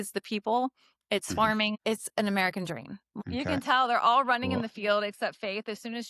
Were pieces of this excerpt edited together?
yes; 2 cuts; at 1.8 s, 3.1 s

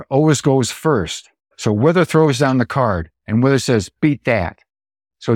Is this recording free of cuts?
no; 2 cuts; at 1.5 s, 3.1 s

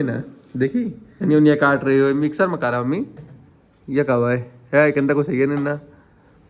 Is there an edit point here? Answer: yes; 1 cut; at 1.1 s

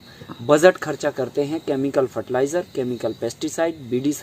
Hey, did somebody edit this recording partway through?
no; 0 cuts

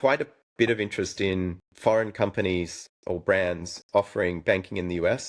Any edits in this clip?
yes; 1 cut; at 1.6 s

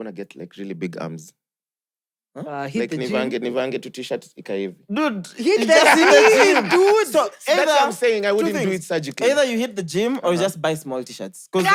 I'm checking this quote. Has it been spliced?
no; 0 cuts

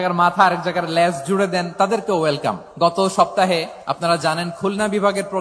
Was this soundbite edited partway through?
yes; 2 cuts; at 2.7 s, 3.7 s

